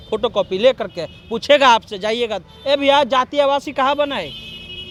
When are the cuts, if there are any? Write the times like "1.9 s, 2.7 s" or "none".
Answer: none